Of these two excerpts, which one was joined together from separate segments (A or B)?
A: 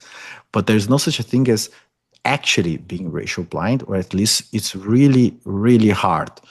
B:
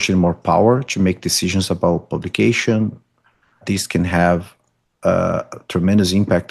B